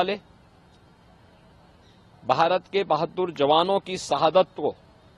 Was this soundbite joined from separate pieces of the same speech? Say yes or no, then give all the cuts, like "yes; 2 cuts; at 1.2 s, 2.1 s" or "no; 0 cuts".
no; 0 cuts